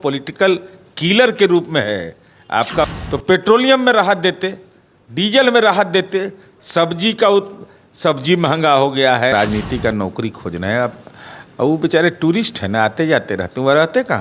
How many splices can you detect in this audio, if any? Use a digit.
2